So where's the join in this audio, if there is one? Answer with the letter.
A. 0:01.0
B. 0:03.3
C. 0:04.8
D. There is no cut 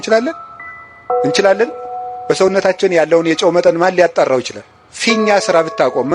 C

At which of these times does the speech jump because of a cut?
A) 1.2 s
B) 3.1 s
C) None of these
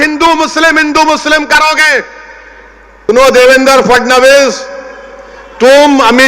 B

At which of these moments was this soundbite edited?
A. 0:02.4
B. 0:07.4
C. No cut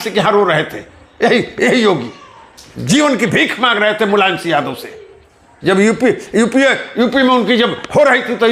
C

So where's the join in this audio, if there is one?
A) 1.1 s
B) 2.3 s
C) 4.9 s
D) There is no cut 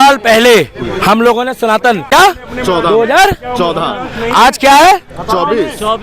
B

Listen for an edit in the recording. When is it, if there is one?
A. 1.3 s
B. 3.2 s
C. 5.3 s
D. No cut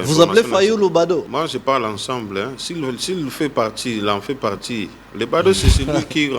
A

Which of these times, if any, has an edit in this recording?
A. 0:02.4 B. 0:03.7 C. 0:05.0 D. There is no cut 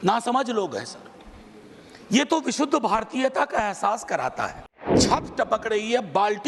C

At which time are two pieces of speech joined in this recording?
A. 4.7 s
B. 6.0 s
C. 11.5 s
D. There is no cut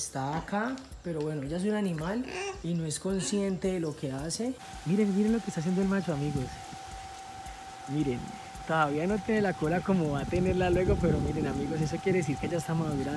A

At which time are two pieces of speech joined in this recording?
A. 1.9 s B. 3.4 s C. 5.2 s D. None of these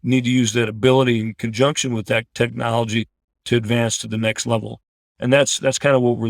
B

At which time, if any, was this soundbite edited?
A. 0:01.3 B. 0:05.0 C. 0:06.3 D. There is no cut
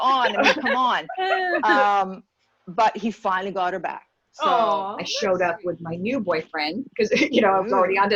B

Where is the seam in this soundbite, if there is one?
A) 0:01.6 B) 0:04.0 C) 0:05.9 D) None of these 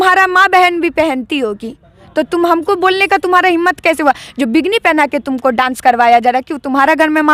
D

